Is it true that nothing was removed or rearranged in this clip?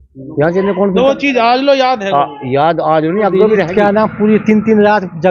no; 1 cut; at 3.7 s

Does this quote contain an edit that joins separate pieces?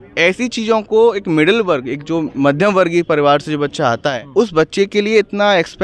yes; 1 cut; at 4.1 s

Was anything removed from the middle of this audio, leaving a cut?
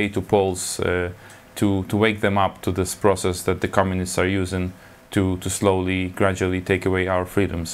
no; 0 cuts

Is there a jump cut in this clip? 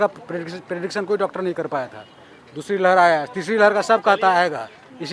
no; 0 cuts

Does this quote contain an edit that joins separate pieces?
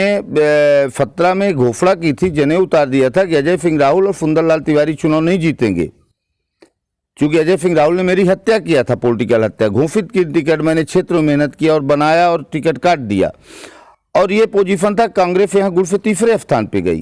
no; 0 cuts

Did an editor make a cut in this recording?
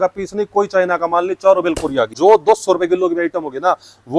yes; 1 cut; at 2.1 s

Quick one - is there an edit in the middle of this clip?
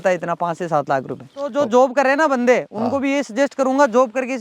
yes; 1 cut; at 1.5 s

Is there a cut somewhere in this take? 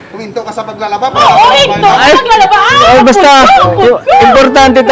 no; 0 cuts

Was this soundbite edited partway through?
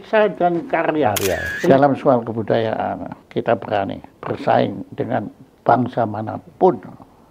yes; 3 cuts; at 1.7 s, 3.2 s, 4.1 s

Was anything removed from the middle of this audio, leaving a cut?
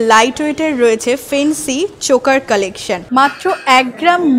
yes; 1 cut; at 3.0 s

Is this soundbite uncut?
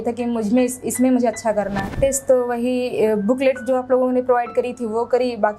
no; 1 cut; at 1.9 s

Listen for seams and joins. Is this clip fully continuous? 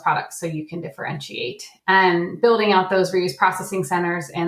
no; 1 cut; at 2.1 s

